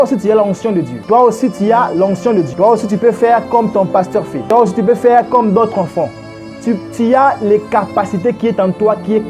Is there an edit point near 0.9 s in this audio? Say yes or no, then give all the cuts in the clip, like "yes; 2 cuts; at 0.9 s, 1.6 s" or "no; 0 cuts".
yes; 3 cuts; at 0.9 s, 2.5 s, 4.4 s